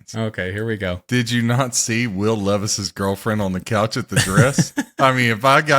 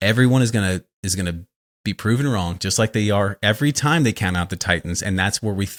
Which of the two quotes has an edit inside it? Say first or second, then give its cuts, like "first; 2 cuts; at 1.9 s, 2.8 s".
first; 1 cut; at 1.0 s